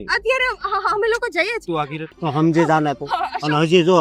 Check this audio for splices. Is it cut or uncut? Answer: cut